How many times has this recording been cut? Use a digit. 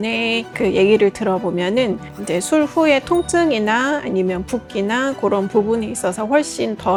0